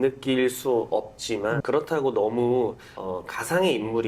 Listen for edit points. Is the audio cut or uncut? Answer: cut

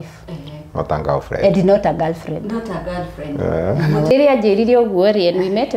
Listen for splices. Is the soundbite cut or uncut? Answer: cut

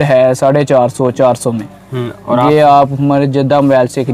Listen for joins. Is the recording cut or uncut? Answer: uncut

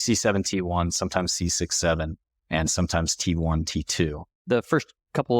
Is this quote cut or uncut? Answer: cut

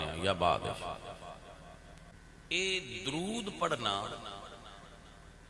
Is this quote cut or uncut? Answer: cut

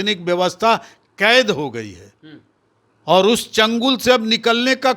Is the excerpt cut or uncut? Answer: uncut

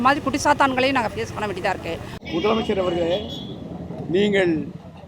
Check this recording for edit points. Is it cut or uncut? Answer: cut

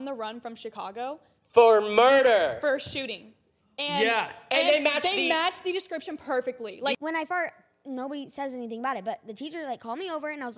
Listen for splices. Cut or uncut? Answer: cut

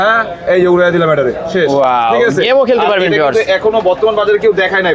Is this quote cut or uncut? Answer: uncut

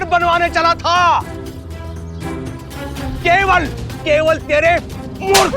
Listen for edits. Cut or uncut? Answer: cut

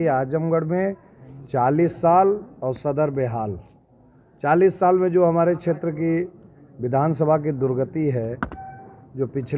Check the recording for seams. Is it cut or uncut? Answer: uncut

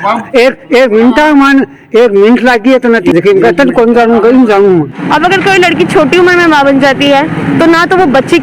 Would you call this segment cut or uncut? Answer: cut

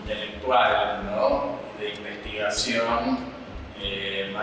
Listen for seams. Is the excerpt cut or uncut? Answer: uncut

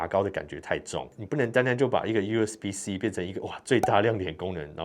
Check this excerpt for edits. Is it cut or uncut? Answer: cut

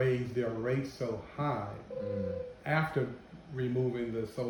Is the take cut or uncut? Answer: uncut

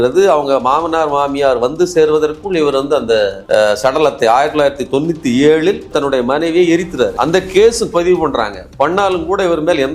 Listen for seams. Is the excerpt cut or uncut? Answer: uncut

